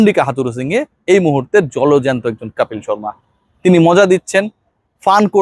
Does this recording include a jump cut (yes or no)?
no